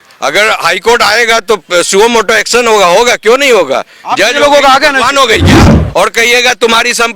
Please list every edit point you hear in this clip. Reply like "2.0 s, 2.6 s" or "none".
5.8 s